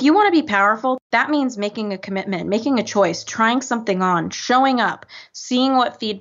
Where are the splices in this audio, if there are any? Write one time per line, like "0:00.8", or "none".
0:01.0